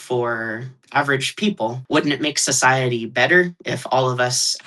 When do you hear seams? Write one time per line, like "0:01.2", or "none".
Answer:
0:01.8